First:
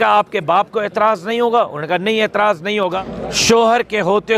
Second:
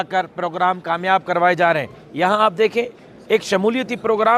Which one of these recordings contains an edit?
first; 1 cut; at 2.9 s

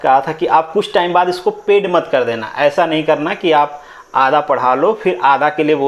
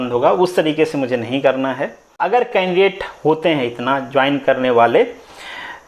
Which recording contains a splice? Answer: second; 1 cut; at 2.1 s

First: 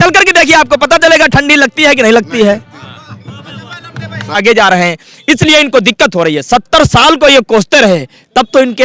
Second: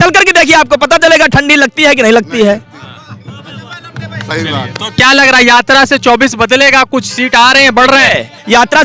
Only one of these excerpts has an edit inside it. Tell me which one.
first; 1 cut; at 4.4 s

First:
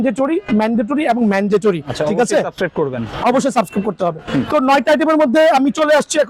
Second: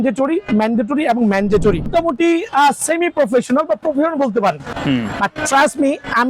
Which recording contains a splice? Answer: second; 2 cuts; at 1.9 s, 4.7 s

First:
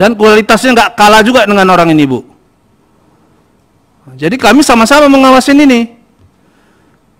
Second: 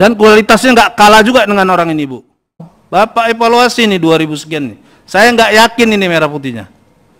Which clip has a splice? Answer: second; 1 cut; at 2.7 s

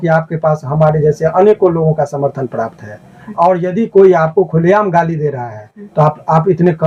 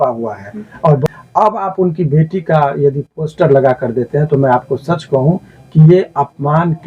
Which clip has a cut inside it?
second; 1 cut; at 1.1 s

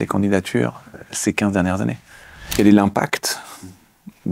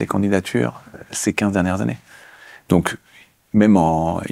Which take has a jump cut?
first; 1 cut; at 2.4 s

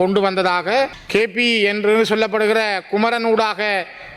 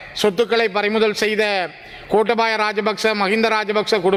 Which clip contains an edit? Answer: first; 1 cut; at 1.0 s

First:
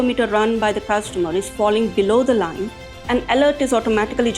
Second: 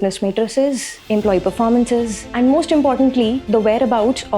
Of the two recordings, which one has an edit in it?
second; 2 cuts; at 0.9 s, 2.2 s

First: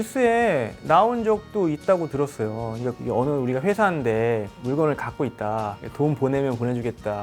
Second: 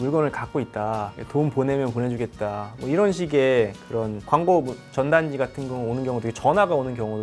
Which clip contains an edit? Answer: first; 1 cut; at 2.9 s

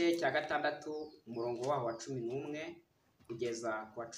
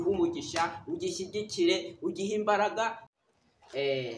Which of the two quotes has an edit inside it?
second; 1 cut; at 3.1 s

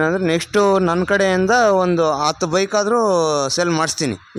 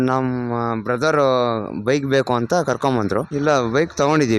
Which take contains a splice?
second; 1 cut; at 3.3 s

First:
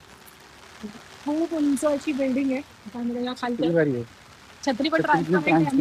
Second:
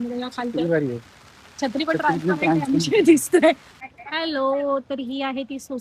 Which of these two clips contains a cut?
second; 1 cut; at 3.7 s

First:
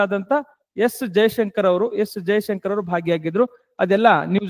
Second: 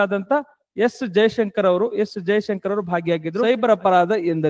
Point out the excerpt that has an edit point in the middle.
second; 1 cut; at 3.4 s

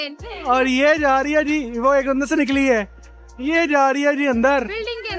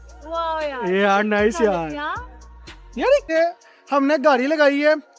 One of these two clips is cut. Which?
second; 1 cut; at 3.3 s

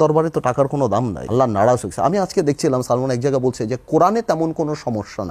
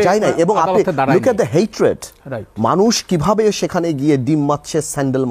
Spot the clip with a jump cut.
first; 1 cut; at 1.2 s

